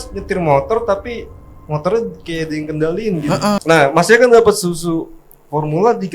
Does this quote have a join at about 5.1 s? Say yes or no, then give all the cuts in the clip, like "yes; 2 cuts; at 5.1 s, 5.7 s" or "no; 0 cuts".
no; 1 cut; at 3.6 s